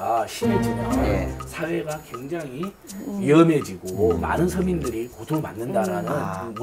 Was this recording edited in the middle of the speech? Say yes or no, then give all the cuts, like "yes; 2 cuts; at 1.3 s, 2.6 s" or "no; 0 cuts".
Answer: no; 0 cuts